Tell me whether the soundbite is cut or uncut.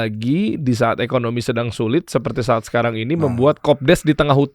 uncut